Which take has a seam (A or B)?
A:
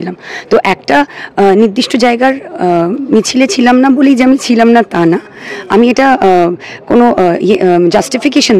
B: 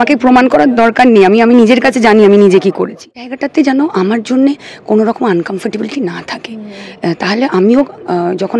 B